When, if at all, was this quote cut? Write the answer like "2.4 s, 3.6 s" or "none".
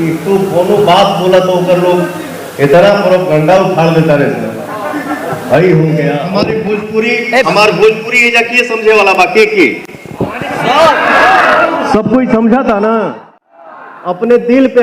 6.2 s